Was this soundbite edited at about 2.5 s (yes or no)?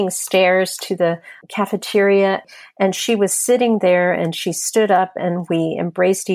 yes